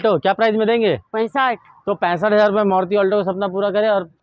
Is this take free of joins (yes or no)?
yes